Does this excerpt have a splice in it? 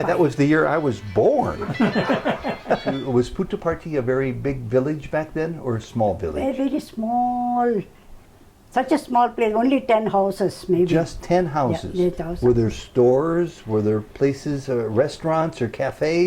yes; 1 cut; at 3.0 s

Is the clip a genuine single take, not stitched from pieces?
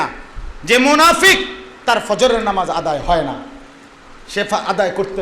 yes; 0 cuts

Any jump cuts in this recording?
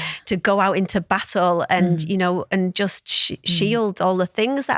no; 0 cuts

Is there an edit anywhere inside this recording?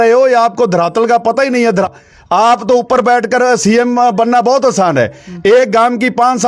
yes; 1 cut; at 1.9 s

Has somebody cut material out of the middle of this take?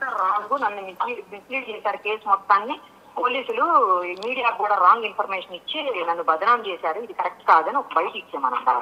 no; 0 cuts

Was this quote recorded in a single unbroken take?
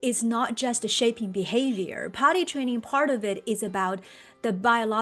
yes; 0 cuts

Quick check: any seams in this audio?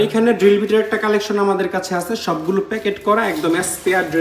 no; 0 cuts

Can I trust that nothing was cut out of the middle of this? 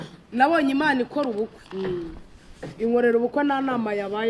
yes; 0 cuts

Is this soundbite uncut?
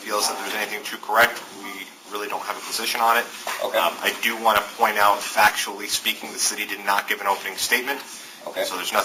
yes; 0 cuts

